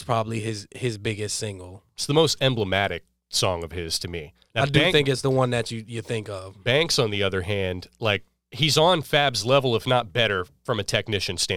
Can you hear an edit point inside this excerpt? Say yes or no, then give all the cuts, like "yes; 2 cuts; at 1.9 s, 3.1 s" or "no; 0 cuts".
yes; 2 cuts; at 4.3 s, 8.4 s